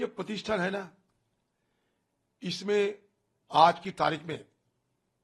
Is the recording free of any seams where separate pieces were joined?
yes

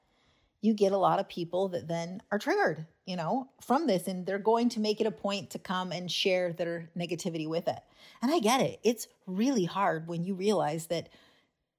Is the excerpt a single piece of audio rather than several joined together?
yes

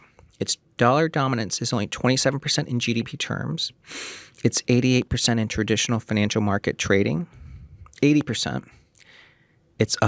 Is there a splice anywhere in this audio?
no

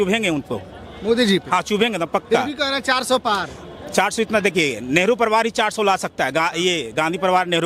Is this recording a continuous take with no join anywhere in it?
yes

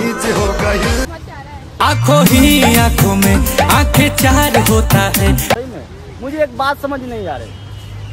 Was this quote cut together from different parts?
yes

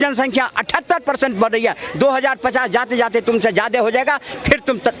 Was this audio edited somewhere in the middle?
no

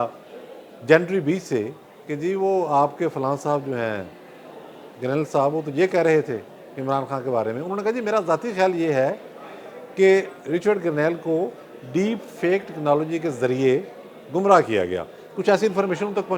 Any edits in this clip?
no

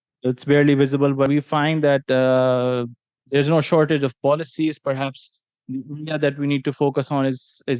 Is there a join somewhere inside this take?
yes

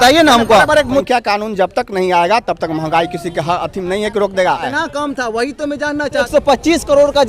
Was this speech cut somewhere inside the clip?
yes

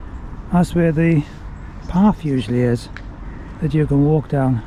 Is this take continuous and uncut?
yes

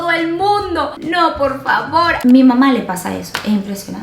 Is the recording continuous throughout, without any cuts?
no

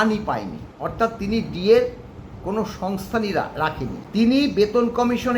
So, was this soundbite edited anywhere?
yes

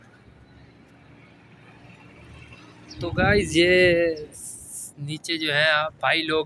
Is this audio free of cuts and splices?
yes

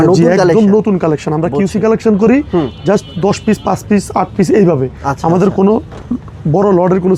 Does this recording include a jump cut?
no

